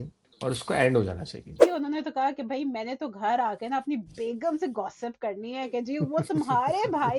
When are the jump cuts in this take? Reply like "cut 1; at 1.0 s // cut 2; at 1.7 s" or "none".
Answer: cut 1; at 1.6 s